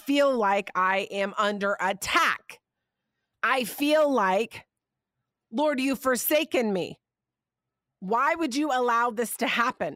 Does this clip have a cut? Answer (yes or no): yes